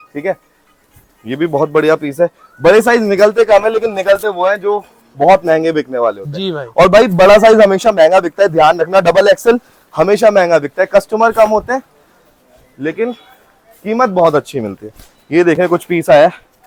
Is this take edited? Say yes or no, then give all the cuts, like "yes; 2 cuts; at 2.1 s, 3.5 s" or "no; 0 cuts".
no; 0 cuts